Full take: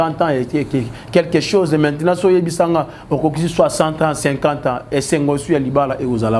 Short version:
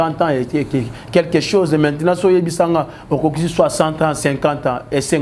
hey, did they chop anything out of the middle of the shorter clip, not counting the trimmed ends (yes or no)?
no